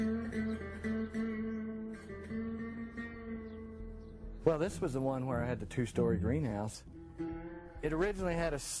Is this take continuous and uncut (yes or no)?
no